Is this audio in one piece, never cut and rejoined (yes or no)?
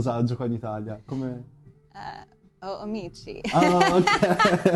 yes